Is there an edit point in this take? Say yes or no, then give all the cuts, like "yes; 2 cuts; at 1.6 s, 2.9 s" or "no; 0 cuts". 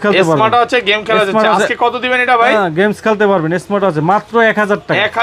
no; 0 cuts